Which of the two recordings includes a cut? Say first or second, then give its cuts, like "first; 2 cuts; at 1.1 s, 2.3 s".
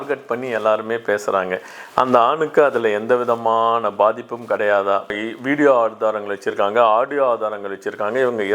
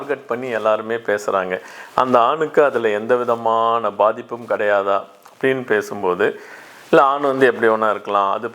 first; 1 cut; at 5.3 s